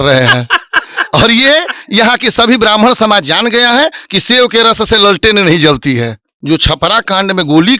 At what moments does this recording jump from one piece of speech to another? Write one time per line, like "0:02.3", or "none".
0:06.3